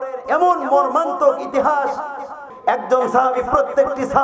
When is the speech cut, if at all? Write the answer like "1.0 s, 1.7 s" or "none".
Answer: 2.3 s